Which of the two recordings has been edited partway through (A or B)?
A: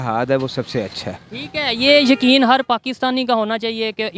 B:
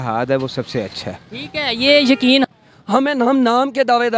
B